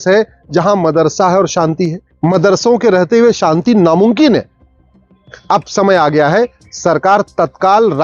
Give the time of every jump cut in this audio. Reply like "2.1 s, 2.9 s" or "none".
2.1 s